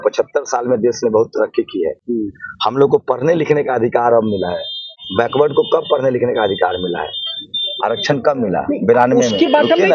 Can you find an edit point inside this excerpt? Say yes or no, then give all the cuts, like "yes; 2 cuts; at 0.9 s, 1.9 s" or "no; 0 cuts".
no; 0 cuts